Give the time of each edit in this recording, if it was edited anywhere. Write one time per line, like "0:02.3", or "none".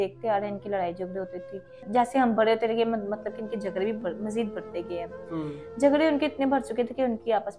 0:01.8